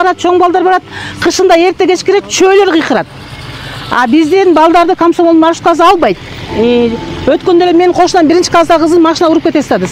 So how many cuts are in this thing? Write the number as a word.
zero